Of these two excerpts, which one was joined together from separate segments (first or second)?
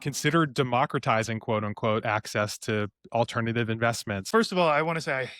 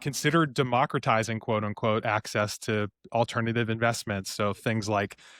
first